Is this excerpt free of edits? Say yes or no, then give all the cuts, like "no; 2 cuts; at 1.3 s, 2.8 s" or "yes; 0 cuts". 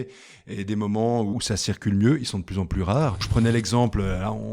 no; 2 cuts; at 1.3 s, 3.3 s